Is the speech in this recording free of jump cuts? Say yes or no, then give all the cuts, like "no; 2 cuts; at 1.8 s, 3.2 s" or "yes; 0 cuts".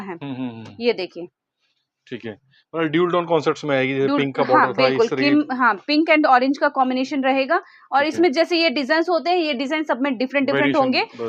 yes; 0 cuts